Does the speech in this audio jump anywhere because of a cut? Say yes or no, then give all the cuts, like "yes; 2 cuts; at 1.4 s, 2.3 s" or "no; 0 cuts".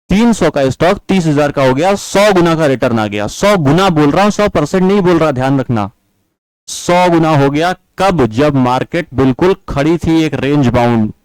no; 0 cuts